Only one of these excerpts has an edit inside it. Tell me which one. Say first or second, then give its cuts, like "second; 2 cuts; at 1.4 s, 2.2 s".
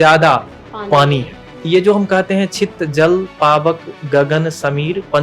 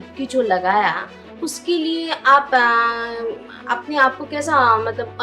first; 1 cut; at 1.6 s